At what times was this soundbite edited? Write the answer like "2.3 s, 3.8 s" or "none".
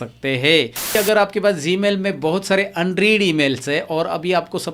0.9 s